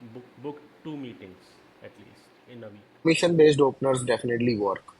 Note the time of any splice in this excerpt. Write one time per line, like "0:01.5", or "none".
0:03.1